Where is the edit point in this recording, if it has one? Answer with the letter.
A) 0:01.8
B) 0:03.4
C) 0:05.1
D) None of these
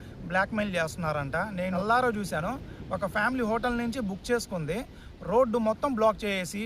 A